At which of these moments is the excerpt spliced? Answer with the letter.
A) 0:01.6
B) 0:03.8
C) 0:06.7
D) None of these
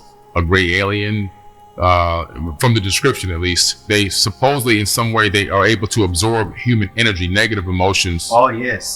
B